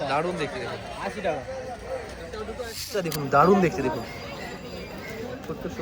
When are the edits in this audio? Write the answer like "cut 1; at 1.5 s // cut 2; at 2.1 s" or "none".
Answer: cut 1; at 3.1 s